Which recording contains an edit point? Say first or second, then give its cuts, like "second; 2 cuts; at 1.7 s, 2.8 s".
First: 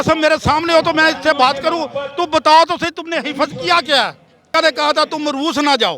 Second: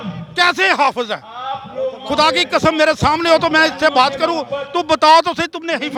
first; 1 cut; at 4.4 s